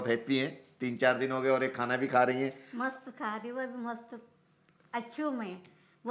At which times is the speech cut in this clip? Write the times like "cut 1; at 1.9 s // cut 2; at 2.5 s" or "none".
none